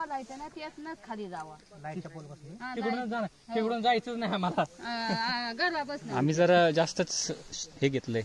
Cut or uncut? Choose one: uncut